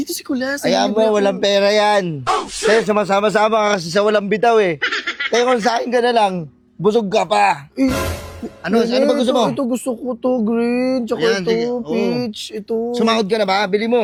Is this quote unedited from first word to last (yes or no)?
yes